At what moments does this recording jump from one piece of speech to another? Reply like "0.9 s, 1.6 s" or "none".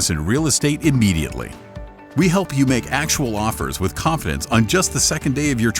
2.0 s